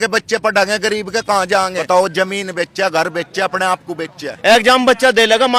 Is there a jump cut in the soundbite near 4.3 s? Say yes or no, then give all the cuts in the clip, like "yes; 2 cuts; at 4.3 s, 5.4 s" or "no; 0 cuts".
yes; 2 cuts; at 1.8 s, 4.3 s